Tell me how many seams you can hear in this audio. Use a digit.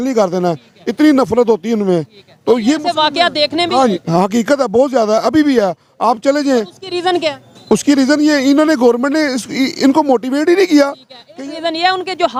0